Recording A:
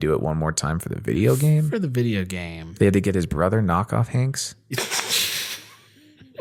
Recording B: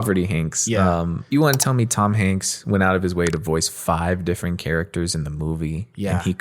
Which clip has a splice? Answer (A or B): B